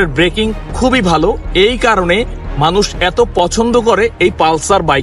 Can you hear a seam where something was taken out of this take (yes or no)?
no